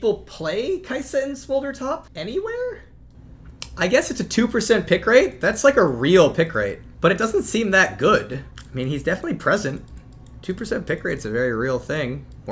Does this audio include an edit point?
yes; 3 cuts; at 2.1 s, 6.8 s, 8.6 s

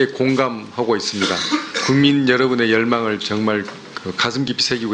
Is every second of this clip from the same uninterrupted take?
yes; 0 cuts

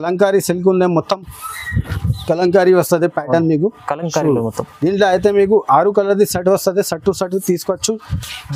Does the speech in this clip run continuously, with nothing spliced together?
yes; 0 cuts

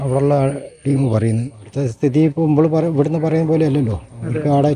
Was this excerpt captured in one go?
no; 1 cut; at 1.6 s

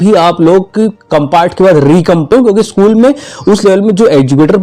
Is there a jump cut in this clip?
yes; 1 cut; at 2.3 s

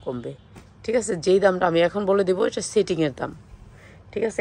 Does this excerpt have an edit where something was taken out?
no; 0 cuts

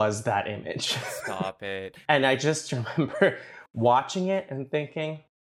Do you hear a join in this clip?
yes; 1 cut; at 1.5 s

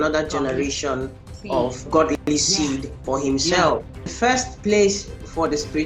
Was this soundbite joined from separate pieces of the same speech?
yes; 2 cuts; at 1.8 s, 4.0 s

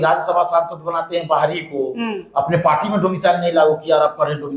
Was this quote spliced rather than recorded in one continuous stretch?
no; 0 cuts

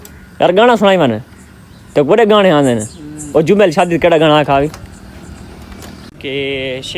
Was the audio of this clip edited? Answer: yes; 1 cut; at 6.1 s

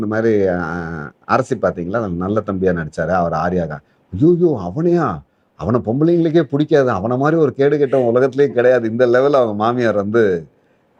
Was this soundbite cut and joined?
no; 0 cuts

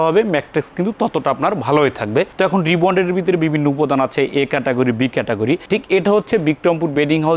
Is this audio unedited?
yes; 0 cuts

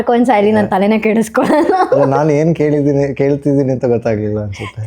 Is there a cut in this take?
no; 0 cuts

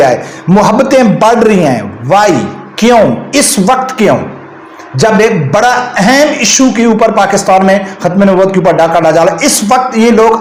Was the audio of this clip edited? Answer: no; 0 cuts

